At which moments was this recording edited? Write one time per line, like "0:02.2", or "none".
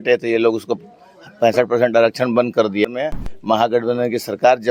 0:02.9

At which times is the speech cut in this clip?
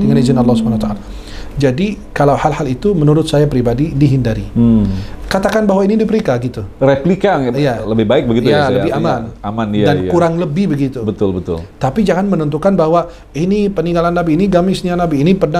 none

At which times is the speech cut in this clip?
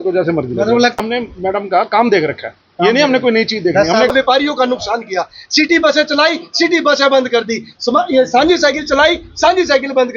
0:01.0
0:04.1

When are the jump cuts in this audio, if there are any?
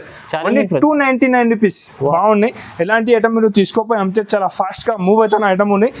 0:02.1

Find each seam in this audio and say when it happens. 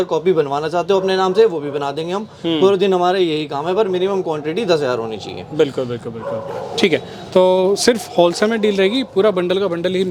none

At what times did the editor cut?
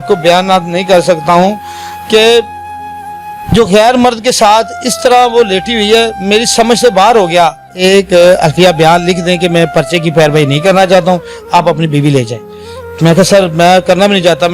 0:07.7

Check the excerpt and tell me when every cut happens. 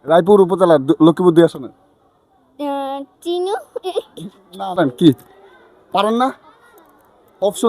0:04.8

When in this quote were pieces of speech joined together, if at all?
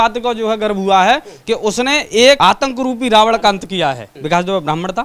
0:02.4
0:04.1

